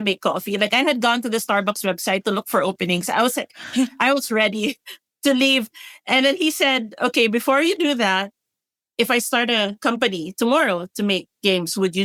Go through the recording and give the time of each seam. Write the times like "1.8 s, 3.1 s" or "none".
none